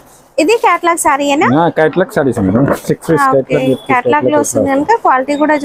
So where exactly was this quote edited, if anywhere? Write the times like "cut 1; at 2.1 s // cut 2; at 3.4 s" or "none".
none